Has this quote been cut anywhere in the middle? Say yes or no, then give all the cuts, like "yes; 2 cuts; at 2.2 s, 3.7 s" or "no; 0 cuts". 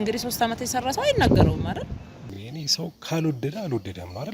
yes; 1 cut; at 2.3 s